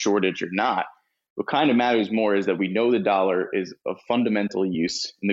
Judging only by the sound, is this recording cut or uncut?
uncut